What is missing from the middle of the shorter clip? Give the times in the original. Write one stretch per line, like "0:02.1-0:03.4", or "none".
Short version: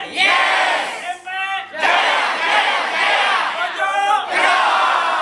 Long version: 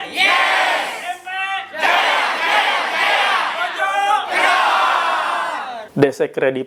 none